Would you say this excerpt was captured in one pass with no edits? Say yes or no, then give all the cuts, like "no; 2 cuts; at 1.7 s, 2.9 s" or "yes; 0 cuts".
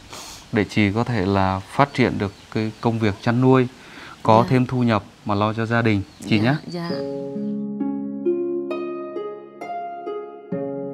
no; 1 cut; at 6.9 s